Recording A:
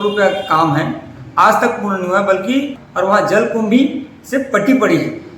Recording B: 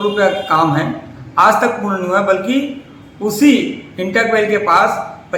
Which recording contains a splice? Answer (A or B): A